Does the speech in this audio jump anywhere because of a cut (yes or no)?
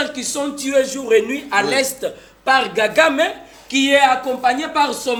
no